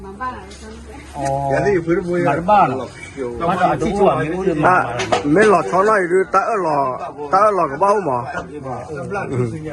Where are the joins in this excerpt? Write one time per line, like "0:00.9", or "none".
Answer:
none